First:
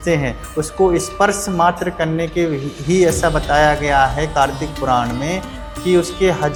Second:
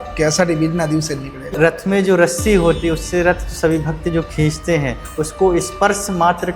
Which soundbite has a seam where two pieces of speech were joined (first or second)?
second